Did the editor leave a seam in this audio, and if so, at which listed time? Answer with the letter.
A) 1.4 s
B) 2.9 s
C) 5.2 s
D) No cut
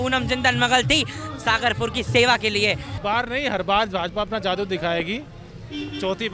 B